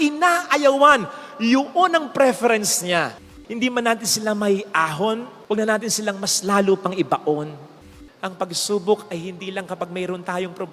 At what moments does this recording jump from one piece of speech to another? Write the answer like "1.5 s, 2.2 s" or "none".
3.2 s, 7.8 s